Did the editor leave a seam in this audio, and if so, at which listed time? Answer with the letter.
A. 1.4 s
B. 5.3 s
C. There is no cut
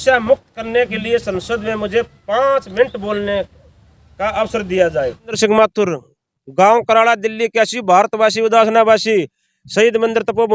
B